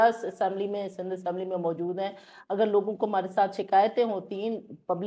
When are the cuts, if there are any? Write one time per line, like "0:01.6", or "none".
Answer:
none